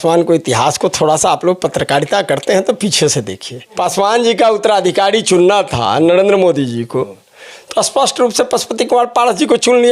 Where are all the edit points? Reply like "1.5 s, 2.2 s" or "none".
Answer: 3.7 s